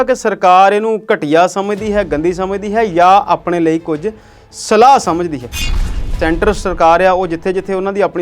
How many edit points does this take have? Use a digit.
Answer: 1